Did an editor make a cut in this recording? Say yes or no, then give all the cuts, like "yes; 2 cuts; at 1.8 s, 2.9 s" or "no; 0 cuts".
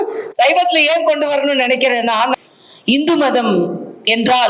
yes; 1 cut; at 2.3 s